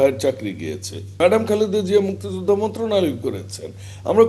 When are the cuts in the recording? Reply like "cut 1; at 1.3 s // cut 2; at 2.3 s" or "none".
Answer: cut 1; at 1.2 s